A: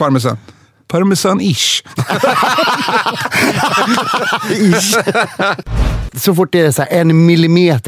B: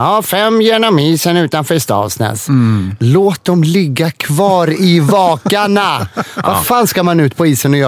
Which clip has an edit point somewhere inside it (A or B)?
A